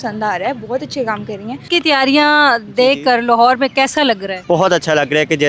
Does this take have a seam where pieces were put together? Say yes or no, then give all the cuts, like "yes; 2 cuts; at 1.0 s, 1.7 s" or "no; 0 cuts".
yes; 2 cuts; at 1.6 s, 4.3 s